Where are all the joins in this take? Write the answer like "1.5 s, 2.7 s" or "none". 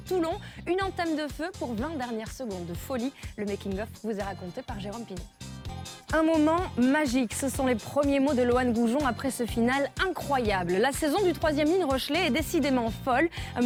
none